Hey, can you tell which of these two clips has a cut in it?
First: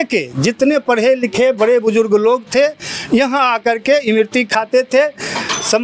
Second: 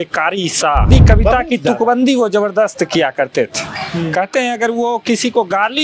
second; 1 cut; at 0.9 s

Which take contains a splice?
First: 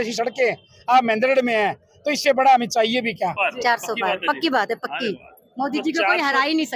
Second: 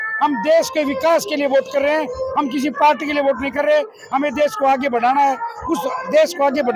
first; 1 cut; at 3.4 s

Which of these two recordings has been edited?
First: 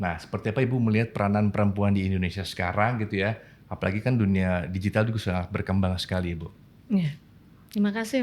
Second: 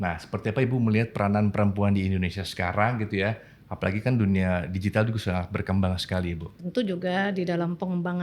second; 1 cut; at 6.6 s

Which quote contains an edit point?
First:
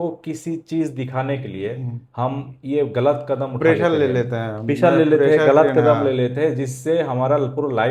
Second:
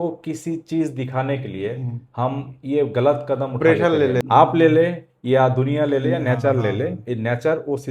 second; 1 cut; at 4.2 s

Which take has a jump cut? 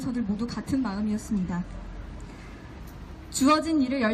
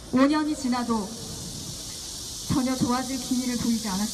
first; 1 cut; at 3.0 s

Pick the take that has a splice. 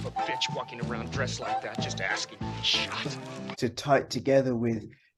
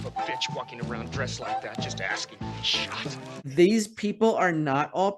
second; 1 cut; at 3.5 s

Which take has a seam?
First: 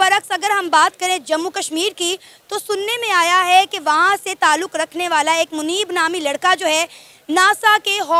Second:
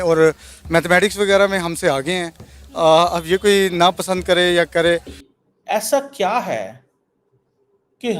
second; 1 cut; at 5.2 s

